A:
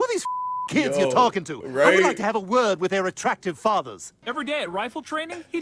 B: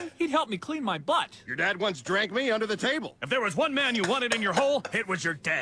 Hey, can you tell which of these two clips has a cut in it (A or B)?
A